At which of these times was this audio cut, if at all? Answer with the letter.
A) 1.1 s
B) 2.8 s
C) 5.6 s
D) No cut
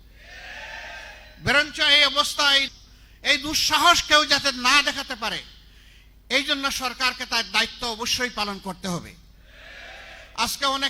B